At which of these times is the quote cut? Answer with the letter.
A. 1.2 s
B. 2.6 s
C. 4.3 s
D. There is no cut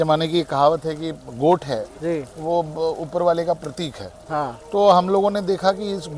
A